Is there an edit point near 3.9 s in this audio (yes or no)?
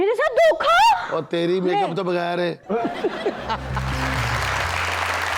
yes